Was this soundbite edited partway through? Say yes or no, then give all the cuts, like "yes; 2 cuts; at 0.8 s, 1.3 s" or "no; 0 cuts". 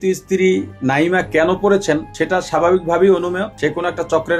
yes; 2 cuts; at 2.1 s, 3.5 s